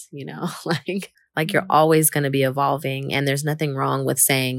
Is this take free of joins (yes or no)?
no